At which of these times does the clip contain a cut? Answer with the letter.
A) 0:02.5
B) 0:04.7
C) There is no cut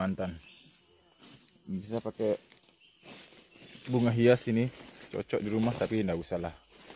C